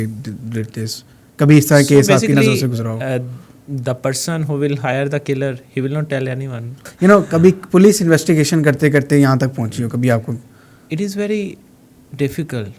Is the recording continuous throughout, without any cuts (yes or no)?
no